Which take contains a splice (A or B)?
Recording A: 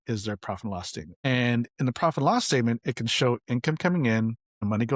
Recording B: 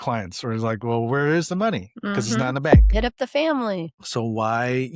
B